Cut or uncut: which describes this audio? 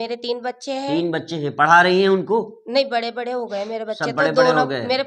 uncut